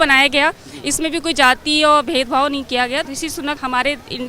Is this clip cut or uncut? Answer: cut